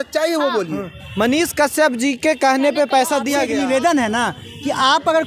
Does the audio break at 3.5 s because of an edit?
yes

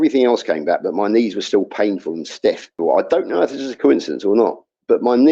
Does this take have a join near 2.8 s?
yes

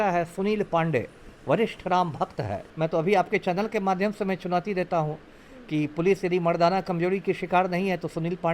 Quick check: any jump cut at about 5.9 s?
no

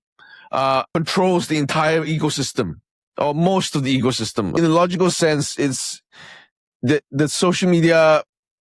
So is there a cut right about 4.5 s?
yes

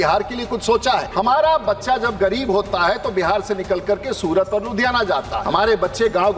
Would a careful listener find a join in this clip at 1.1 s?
yes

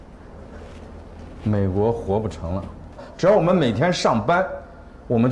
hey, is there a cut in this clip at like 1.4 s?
no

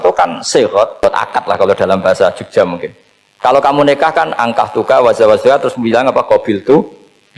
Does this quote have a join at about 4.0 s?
no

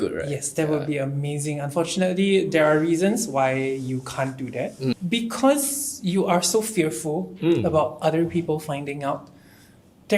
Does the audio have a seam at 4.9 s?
yes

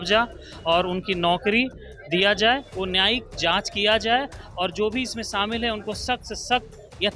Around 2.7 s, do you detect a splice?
yes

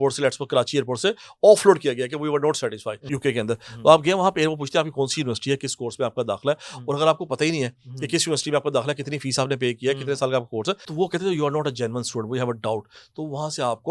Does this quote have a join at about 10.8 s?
yes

